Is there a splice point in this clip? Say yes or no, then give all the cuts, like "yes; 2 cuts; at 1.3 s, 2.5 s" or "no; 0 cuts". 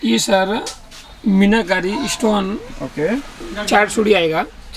no; 0 cuts